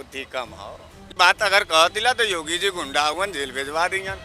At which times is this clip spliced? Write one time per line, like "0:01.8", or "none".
0:01.1

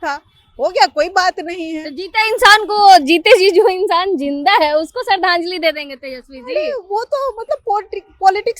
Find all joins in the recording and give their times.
none

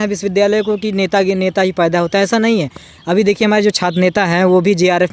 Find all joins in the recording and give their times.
none

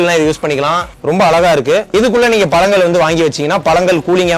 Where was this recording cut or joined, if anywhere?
0:00.9
0:01.9

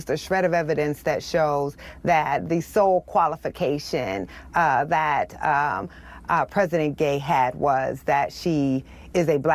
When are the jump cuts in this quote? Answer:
none

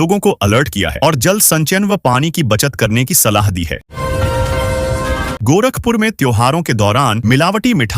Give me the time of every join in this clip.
0:03.9
0:05.4

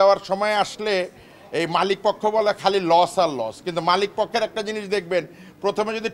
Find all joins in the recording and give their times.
none

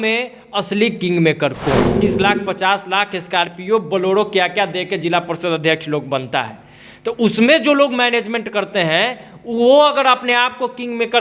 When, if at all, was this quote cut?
0:02.0

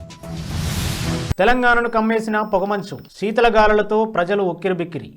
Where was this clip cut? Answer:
0:01.3

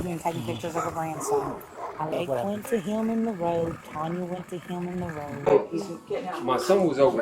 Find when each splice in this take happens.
0:02.1
0:05.5

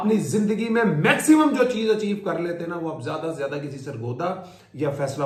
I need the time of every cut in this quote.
none

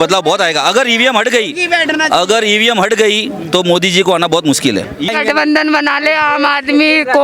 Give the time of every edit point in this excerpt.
0:05.1

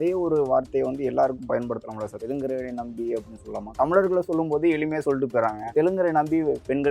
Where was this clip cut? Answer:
0:02.2
0:03.7
0:05.7

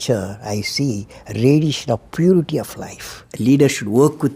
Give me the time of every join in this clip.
0:03.2

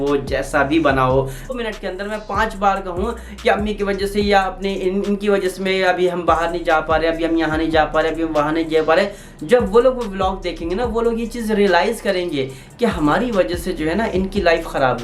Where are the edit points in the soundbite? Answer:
0:01.5

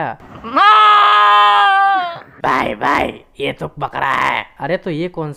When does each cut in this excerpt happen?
none

